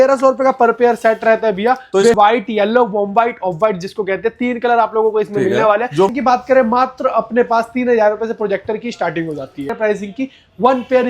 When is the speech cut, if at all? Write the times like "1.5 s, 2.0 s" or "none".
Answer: 2.1 s, 6.1 s, 9.7 s